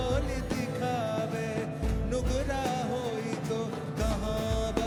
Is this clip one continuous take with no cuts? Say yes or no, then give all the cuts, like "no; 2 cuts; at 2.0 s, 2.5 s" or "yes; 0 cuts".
yes; 0 cuts